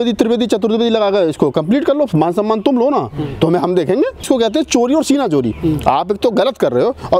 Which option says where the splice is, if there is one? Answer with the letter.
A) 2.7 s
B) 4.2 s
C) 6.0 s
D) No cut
B